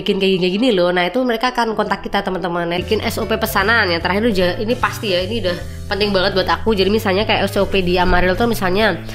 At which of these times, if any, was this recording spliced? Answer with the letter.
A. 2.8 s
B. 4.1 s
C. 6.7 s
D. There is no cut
A